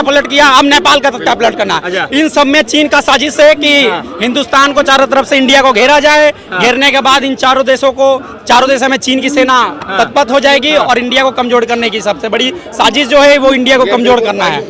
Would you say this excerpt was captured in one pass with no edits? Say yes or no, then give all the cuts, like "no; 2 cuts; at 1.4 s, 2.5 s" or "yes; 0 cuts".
yes; 0 cuts